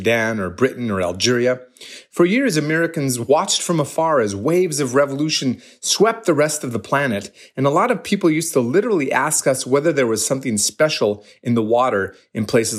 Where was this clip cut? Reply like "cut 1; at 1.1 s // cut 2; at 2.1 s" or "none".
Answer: none

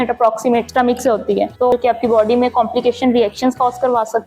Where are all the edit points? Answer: cut 1; at 1.7 s

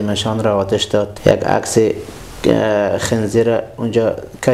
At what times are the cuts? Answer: cut 1; at 1.1 s

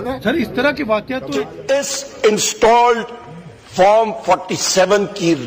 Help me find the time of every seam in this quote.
cut 1; at 1.5 s

